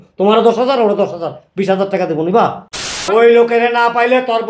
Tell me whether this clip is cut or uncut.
cut